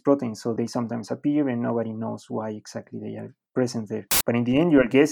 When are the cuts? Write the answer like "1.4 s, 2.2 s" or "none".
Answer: 4.1 s